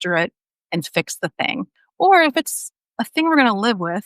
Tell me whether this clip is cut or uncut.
cut